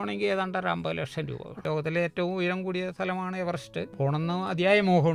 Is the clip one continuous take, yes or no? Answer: no